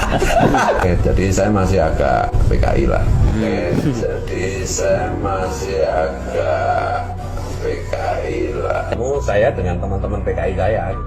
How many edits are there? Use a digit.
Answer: 1